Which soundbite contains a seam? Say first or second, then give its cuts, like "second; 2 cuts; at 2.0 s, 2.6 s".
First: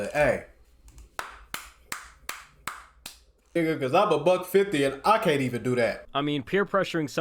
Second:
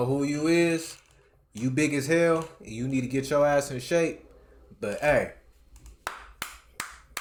first; 2 cuts; at 3.6 s, 6.1 s